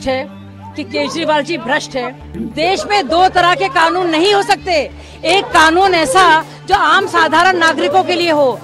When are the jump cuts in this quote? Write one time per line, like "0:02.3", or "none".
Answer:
0:02.5

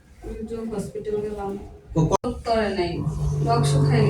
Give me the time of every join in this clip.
0:02.2

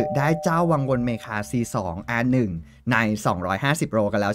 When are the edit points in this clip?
none

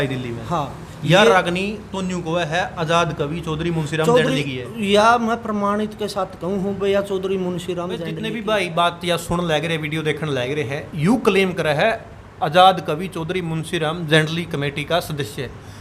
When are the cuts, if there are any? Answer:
0:08.2

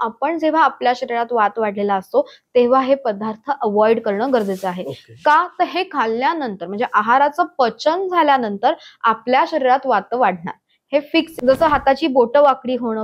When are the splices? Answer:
0:11.3

